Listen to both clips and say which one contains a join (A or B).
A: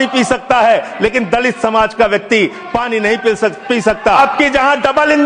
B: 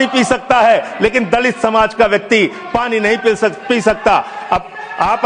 A